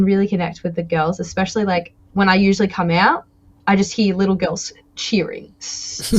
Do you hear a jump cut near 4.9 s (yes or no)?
no